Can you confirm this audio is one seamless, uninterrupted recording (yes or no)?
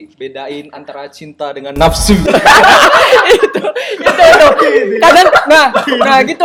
yes